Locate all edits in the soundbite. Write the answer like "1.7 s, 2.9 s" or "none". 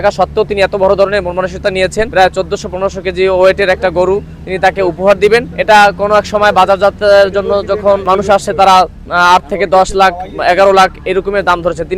2.1 s, 5.5 s, 8.1 s